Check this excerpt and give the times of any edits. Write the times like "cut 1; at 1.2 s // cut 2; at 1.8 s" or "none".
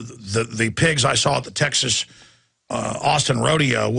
cut 1; at 1.5 s